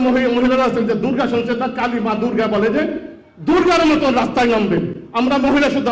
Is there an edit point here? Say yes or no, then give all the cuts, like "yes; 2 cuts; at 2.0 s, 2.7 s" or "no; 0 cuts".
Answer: no; 0 cuts